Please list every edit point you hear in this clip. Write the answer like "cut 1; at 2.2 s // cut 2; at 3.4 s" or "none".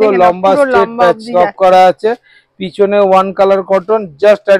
none

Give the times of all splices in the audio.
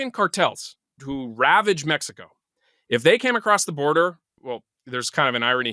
cut 1; at 1.0 s // cut 2; at 4.3 s

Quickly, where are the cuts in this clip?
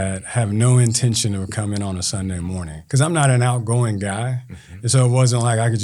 cut 1; at 2.8 s

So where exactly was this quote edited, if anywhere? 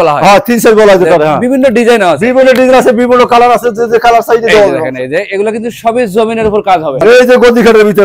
cut 1; at 7.0 s

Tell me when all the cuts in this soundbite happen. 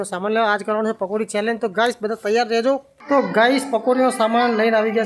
cut 1; at 2.9 s

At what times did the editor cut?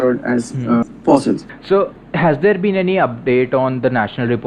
cut 1; at 0.8 s // cut 2; at 1.6 s

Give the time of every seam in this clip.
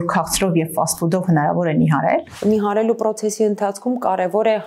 cut 1; at 2.3 s

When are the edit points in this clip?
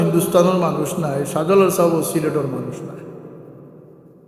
none

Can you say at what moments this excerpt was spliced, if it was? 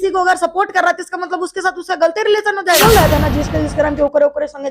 cut 1; at 2.8 s

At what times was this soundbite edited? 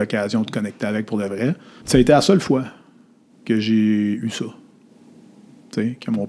cut 1; at 1.7 s

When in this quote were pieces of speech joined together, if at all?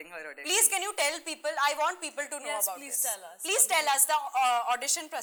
none

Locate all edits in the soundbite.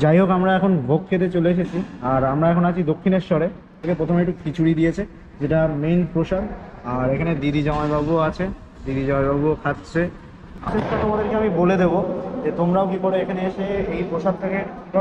cut 1; at 3.9 s // cut 2; at 10.5 s

